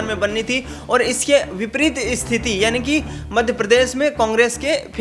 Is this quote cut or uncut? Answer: uncut